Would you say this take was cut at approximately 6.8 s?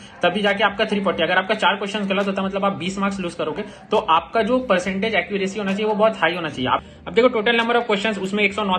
yes; 1 cut; at 6.8 s

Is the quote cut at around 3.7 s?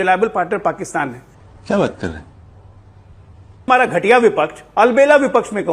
yes; 1 cut; at 3.7 s

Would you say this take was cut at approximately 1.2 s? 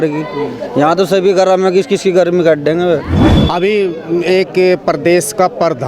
no; 1 cut; at 3.2 s

